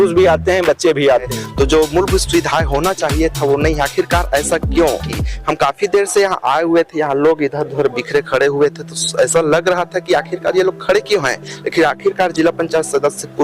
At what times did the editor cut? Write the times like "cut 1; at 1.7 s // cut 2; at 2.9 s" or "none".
cut 1; at 1.4 s // cut 2; at 5.2 s